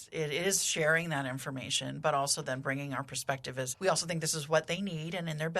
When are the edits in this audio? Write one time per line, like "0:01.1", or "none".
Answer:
0:03.7